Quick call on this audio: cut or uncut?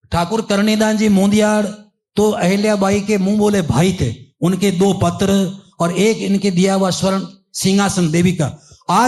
uncut